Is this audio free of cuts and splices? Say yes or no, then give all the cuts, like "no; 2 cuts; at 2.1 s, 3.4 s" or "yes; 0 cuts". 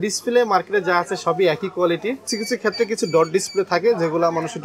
no; 1 cut; at 2.2 s